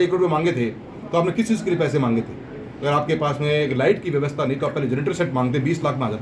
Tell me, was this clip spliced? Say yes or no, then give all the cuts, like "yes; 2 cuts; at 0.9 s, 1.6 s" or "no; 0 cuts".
no; 0 cuts